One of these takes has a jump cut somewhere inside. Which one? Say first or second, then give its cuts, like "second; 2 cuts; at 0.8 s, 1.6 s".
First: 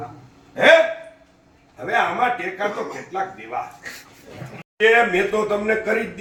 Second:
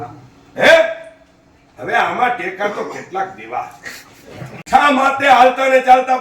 second; 1 cut; at 4.6 s